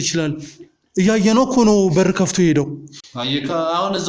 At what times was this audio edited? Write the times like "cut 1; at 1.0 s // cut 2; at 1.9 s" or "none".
none